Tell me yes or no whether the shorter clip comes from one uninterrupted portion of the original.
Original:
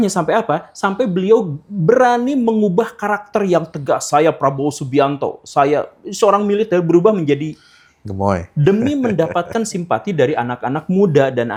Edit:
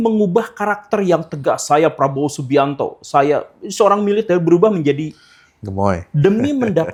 yes